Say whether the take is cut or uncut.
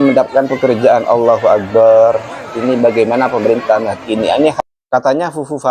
cut